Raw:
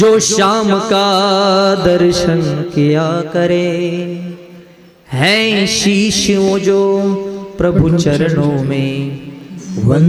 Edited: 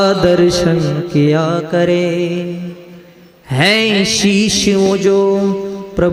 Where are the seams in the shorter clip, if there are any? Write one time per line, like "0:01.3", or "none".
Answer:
none